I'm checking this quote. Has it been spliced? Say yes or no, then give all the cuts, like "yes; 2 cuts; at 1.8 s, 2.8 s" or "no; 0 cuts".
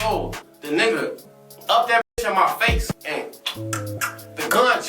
yes; 1 cut; at 2.9 s